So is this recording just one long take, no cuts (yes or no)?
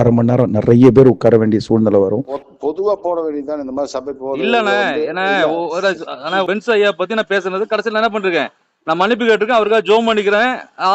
no